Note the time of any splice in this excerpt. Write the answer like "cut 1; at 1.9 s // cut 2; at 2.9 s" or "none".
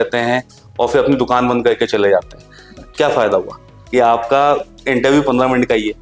cut 1; at 3.8 s